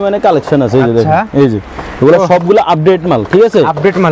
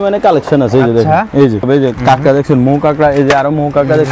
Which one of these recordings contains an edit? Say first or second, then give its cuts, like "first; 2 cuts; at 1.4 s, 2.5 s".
second; 1 cut; at 1.7 s